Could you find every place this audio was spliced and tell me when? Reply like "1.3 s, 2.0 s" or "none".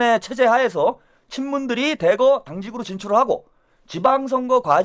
none

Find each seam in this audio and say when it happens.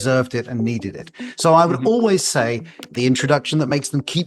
2.8 s

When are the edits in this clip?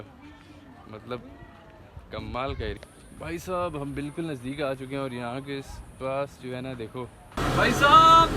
2.8 s, 7.3 s

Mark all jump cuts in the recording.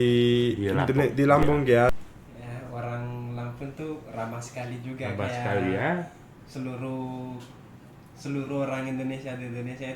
1.9 s

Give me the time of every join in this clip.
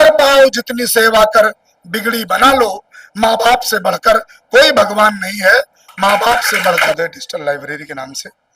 6.9 s

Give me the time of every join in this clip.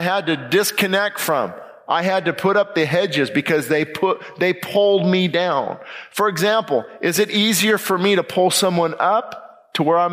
none

